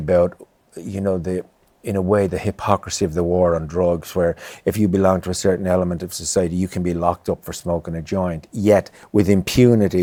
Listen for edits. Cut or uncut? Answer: uncut